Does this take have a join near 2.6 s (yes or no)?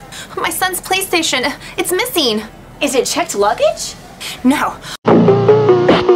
yes